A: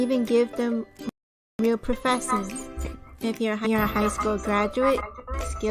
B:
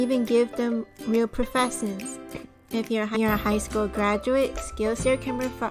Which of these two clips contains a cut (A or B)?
B